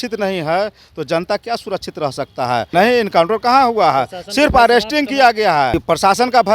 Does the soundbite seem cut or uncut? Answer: cut